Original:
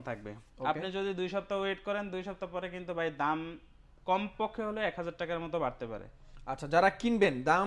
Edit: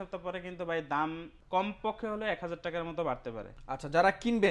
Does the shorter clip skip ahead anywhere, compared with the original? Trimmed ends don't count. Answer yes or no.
yes